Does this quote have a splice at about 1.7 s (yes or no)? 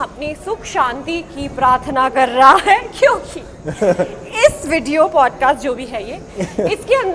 no